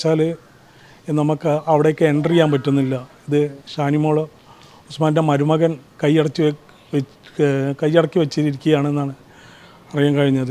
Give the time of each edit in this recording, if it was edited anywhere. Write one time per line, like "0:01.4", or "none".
none